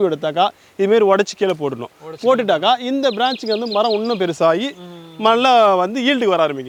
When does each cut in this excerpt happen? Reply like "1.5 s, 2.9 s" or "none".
none